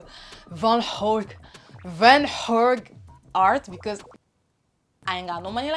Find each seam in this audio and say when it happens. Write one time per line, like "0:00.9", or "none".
none